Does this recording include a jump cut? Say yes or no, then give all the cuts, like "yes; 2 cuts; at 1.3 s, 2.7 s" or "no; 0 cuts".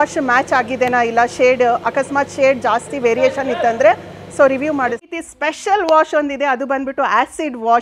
yes; 1 cut; at 5.1 s